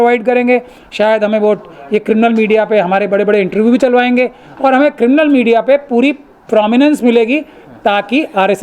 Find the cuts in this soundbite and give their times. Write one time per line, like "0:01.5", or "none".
none